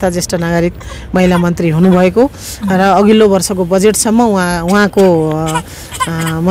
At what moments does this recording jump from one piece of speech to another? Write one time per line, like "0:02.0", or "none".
none